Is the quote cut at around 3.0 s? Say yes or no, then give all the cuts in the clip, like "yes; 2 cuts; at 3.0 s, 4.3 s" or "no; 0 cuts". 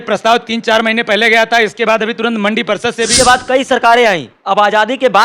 yes; 1 cut; at 3.0 s